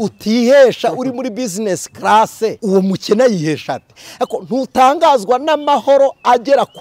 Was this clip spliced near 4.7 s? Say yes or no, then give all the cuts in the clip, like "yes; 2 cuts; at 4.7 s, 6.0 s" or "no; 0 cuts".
no; 1 cut; at 2.6 s